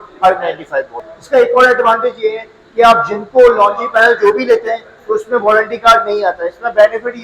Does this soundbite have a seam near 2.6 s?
no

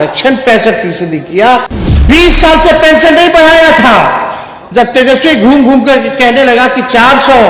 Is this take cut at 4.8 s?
no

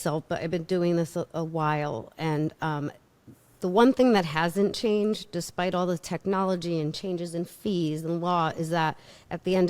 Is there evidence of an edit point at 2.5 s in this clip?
no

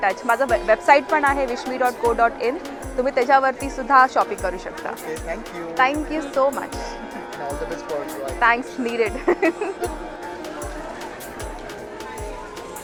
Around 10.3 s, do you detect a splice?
no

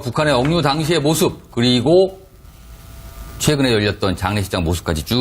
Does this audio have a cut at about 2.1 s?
yes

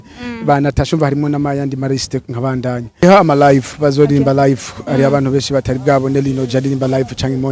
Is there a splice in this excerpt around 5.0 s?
no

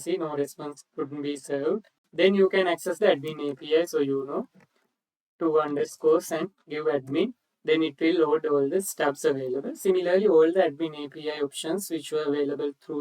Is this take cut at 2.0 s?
yes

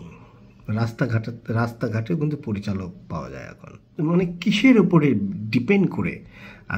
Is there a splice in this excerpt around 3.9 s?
yes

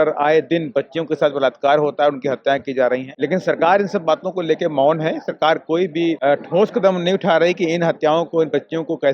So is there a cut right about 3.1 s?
yes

